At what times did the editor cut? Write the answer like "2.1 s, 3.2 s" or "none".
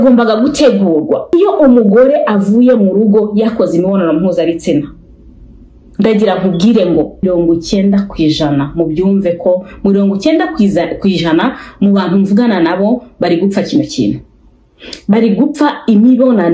1.3 s, 7.2 s